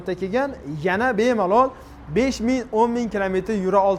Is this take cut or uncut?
uncut